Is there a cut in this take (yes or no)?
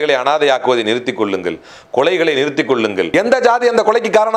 yes